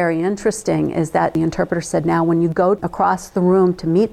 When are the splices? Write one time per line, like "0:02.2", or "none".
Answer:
0:01.3
0:02.8